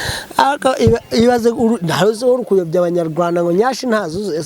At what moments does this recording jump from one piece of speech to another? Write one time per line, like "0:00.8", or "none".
none